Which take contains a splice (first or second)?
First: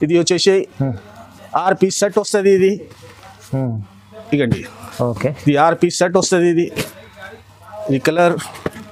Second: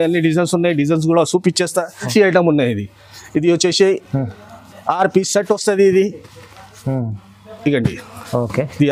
second